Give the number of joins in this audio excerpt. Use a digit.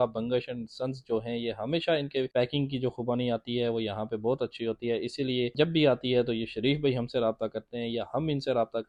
0